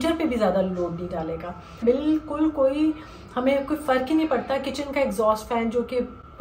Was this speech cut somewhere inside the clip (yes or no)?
yes